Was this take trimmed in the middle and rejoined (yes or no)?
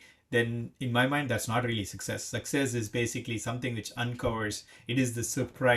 no